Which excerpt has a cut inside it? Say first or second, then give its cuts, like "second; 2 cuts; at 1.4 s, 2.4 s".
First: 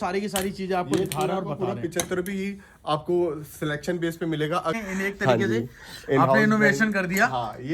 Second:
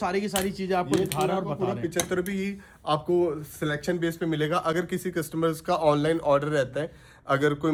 first; 1 cut; at 4.7 s